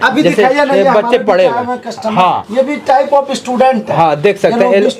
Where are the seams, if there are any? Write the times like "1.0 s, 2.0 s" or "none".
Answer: none